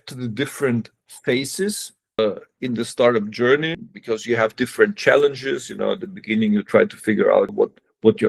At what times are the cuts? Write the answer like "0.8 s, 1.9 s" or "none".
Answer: 2.2 s, 3.8 s, 7.5 s